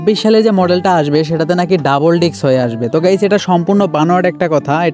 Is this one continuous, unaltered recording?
yes; 0 cuts

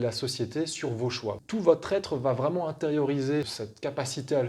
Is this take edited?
yes; 2 cuts; at 1.4 s, 3.5 s

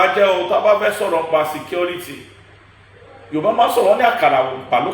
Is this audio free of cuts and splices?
yes; 0 cuts

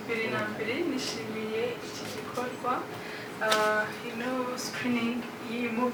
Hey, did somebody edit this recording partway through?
no; 0 cuts

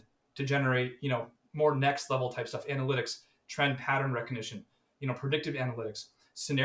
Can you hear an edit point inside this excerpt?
no; 0 cuts

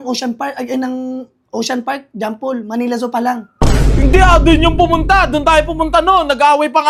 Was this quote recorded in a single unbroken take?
yes; 0 cuts

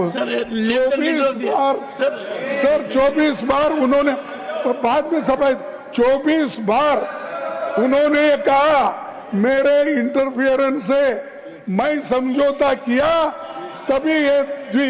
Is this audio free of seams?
yes; 0 cuts

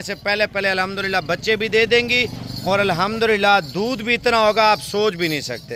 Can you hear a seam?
no; 0 cuts

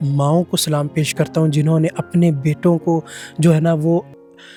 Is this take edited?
no; 0 cuts

